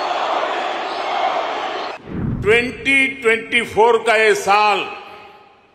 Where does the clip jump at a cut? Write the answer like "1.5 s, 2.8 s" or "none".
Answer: none